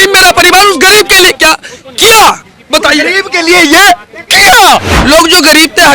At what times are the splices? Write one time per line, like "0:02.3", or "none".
0:04.9

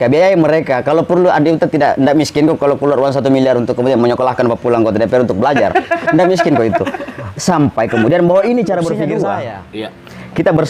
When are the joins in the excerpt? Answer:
0:09.3

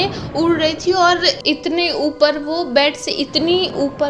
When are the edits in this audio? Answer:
0:01.4

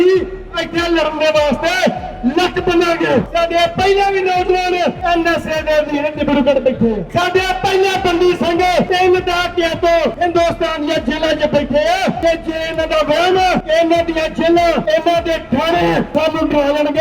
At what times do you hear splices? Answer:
0:03.3
0:05.0
0:07.0
0:08.9
0:10.1
0:12.2
0:13.6
0:14.8
0:16.1

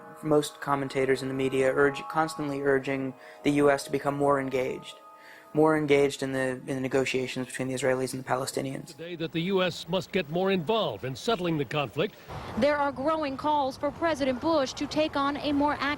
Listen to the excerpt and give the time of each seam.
0:13.2

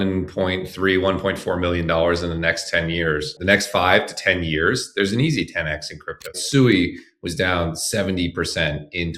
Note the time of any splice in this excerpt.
0:03.3
0:06.3

